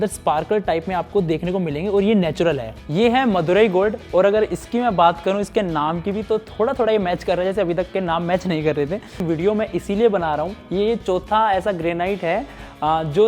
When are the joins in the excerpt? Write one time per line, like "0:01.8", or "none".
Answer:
0:02.8
0:09.2